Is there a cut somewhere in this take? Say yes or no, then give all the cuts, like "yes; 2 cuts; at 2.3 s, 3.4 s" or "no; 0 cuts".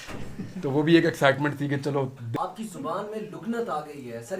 yes; 1 cut; at 2.2 s